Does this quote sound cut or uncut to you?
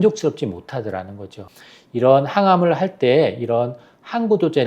cut